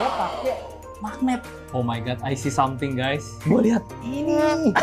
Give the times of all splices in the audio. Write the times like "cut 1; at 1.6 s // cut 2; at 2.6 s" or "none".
cut 1; at 1.6 s // cut 2; at 3.3 s